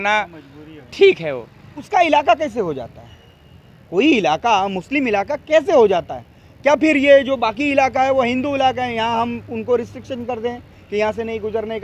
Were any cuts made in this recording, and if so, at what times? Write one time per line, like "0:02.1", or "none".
0:01.9

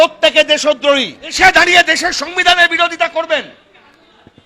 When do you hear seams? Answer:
0:01.3

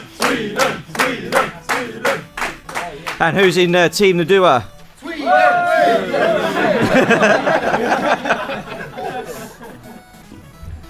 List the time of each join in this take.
0:02.0

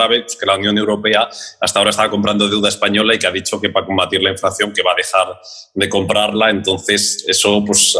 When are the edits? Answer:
none

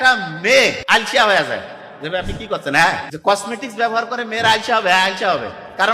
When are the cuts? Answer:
0:00.8
0:03.1

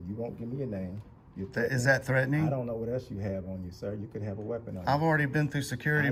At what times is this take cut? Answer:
none

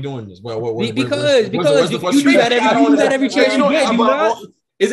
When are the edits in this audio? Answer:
none

